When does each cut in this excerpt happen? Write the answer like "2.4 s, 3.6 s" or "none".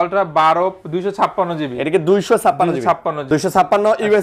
3.2 s